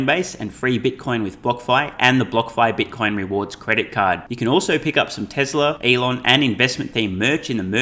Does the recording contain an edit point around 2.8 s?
no; 1 cut; at 5.8 s

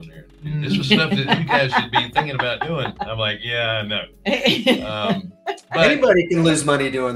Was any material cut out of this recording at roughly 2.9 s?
yes; 1 cut; at 2.9 s

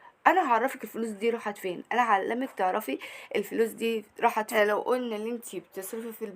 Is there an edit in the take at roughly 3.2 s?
no; 1 cut; at 4.5 s

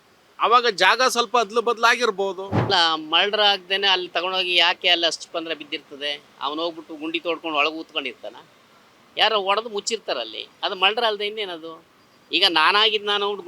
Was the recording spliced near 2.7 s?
yes; 1 cut; at 2.7 s

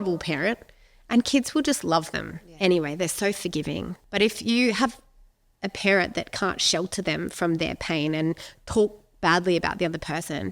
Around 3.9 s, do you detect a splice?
yes; 1 cut; at 3.9 s

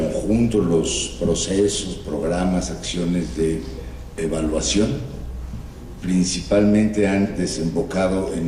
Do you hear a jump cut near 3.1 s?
yes; 1 cut; at 3.1 s

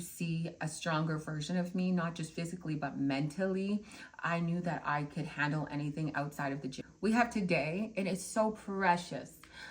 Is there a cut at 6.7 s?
yes; 1 cut; at 6.7 s

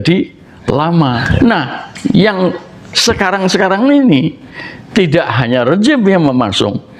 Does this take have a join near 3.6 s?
no; 1 cut; at 1.2 s

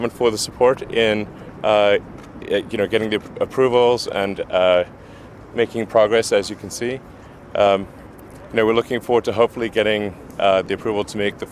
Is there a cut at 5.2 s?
no; 0 cuts

